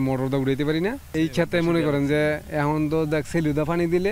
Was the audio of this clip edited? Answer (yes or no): no